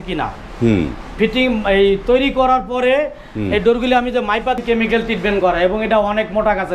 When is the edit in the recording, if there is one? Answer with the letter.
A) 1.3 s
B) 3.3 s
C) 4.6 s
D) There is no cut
C